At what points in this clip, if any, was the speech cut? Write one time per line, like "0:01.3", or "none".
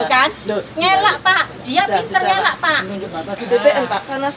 0:03.4